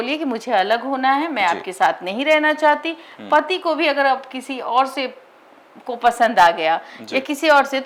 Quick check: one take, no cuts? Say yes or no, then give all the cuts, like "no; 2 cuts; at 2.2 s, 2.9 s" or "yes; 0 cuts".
yes; 0 cuts